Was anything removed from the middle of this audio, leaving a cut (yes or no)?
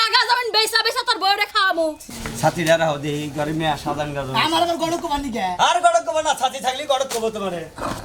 yes